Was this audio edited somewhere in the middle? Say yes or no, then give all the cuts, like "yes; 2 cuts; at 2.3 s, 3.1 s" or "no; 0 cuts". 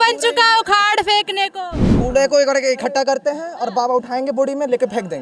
no; 0 cuts